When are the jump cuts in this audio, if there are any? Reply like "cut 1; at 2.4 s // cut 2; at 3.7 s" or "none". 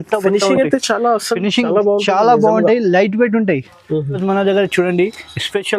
cut 1; at 4.2 s

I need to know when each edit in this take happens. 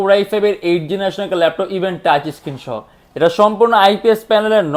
none

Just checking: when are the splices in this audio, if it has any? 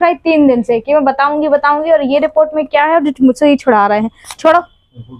none

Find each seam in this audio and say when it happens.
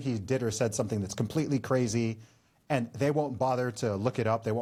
none

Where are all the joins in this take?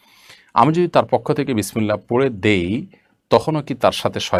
none

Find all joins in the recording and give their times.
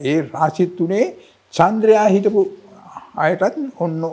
none

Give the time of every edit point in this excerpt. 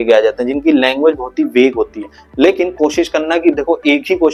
none

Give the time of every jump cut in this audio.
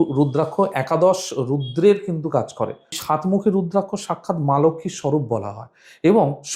cut 1; at 3.0 s

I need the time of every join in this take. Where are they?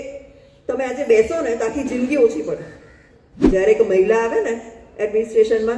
cut 1; at 3.4 s

